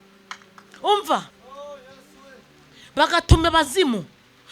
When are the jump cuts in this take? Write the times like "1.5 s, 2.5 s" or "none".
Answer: 1.4 s